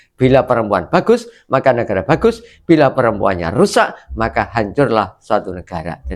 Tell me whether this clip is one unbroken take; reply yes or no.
yes